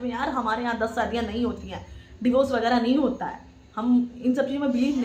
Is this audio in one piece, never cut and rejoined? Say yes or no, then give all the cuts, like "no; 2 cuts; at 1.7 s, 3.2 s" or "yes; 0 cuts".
yes; 0 cuts